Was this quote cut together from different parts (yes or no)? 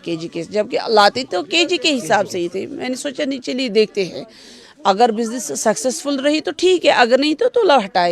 no